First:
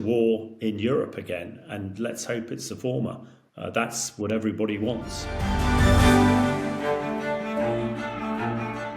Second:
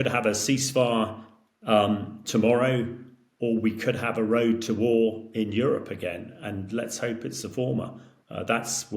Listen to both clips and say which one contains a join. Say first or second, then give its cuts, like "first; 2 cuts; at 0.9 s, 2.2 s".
first; 1 cut; at 5.6 s